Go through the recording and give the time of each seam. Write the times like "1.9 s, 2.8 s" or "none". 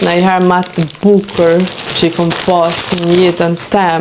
none